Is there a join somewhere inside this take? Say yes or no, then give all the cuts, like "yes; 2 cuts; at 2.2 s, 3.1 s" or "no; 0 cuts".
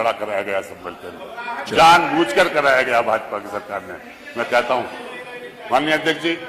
no; 0 cuts